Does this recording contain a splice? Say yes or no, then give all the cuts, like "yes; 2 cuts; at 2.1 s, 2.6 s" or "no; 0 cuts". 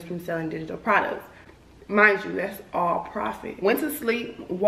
yes; 1 cut; at 3.5 s